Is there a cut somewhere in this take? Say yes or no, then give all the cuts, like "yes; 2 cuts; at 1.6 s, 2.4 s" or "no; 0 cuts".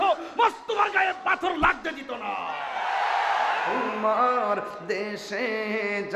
yes; 1 cut; at 3.9 s